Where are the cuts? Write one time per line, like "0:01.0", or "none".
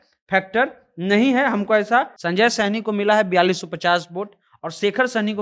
0:02.2